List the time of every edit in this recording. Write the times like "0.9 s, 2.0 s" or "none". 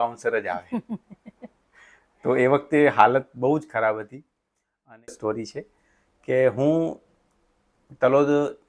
5.1 s